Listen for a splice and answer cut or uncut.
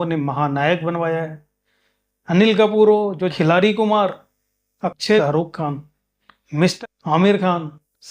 cut